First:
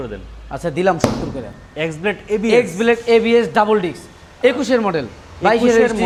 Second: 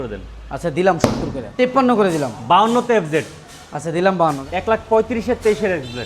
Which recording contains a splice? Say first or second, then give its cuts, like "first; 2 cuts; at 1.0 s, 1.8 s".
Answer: second; 2 cuts; at 1.5 s, 4.4 s